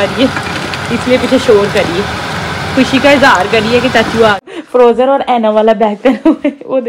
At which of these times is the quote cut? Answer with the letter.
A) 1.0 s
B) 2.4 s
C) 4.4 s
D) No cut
C